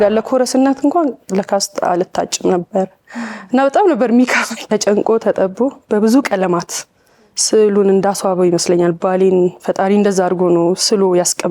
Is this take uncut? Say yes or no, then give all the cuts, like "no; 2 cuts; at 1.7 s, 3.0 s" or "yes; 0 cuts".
no; 1 cut; at 4.6 s